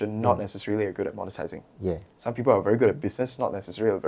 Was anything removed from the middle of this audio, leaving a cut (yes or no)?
no